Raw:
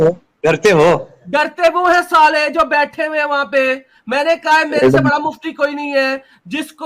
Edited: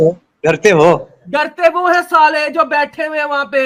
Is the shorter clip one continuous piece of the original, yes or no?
yes